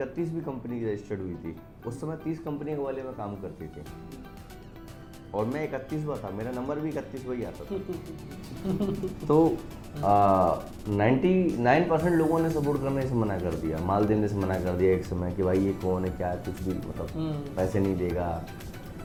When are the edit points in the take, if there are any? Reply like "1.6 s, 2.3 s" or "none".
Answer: none